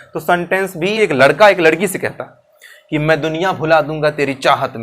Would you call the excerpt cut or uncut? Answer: cut